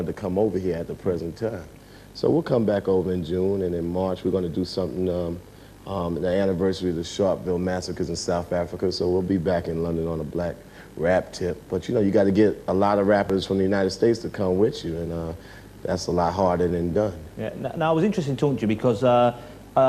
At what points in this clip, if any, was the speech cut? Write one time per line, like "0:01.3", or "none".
none